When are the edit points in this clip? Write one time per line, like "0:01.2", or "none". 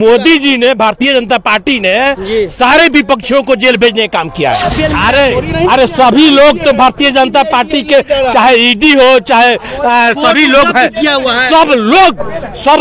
0:04.7